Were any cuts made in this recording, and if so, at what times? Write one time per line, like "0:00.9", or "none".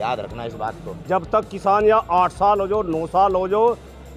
0:00.9